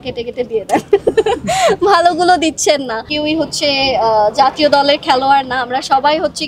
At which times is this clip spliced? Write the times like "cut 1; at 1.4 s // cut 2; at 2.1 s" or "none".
cut 1; at 3.1 s